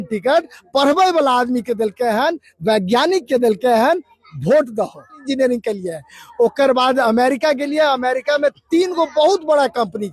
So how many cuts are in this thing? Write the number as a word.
one